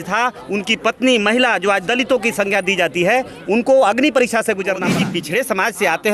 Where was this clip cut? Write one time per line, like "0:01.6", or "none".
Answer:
0:04.9